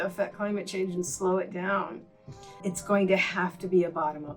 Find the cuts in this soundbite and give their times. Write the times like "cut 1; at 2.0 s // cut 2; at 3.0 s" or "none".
cut 1; at 2.7 s